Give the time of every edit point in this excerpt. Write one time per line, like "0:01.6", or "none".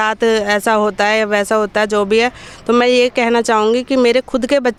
none